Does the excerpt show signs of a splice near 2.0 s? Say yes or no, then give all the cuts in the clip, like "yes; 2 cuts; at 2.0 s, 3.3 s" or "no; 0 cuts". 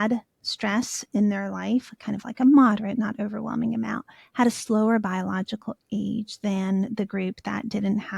no; 0 cuts